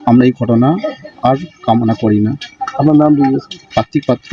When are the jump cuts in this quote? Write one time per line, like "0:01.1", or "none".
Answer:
none

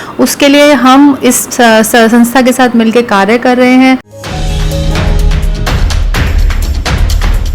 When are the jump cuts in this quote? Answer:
0:04.1

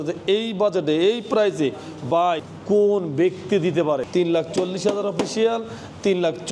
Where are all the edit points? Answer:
none

